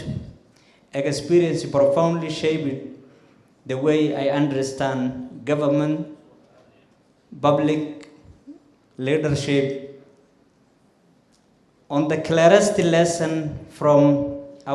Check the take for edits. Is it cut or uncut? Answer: uncut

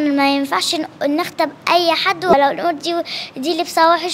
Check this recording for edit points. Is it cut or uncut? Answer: cut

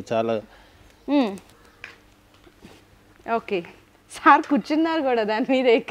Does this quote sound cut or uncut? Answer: uncut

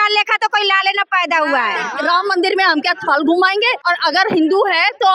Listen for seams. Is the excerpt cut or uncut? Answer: cut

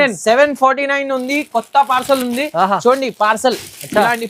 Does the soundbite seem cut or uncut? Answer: uncut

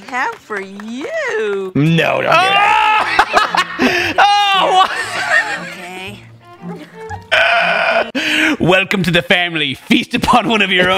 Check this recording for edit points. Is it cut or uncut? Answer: uncut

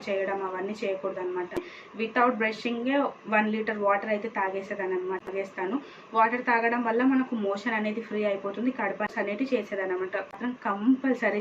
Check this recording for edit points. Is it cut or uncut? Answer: cut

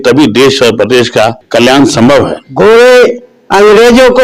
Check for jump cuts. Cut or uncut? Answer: cut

